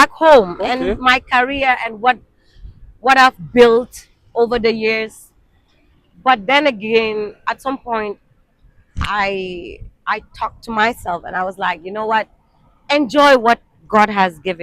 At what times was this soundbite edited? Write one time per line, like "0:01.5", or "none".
none